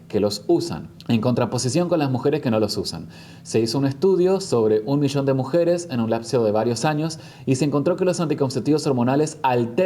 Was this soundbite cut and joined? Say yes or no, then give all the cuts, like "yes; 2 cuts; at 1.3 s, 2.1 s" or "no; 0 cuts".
no; 0 cuts